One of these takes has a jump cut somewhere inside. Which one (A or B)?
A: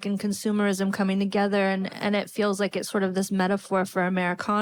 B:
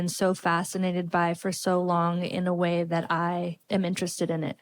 B